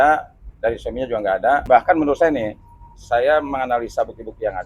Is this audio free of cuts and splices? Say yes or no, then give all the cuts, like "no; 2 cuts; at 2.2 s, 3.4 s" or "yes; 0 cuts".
no; 1 cut; at 1.6 s